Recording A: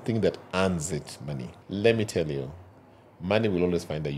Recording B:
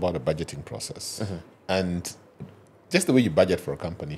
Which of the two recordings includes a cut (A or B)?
A